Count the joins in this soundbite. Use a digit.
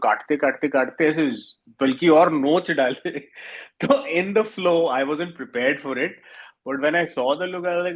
0